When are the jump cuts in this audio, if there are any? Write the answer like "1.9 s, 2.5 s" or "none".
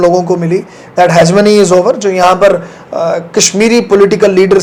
none